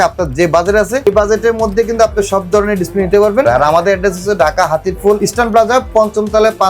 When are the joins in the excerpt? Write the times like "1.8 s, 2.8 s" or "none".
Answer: 1.1 s, 3.4 s, 5.2 s